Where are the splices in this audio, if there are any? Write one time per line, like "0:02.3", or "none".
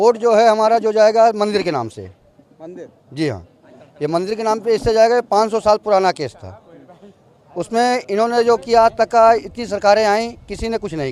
none